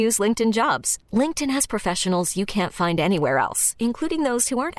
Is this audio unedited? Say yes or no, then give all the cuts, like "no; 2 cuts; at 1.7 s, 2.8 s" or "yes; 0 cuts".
yes; 0 cuts